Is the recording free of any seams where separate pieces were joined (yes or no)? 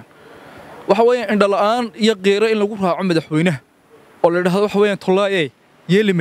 yes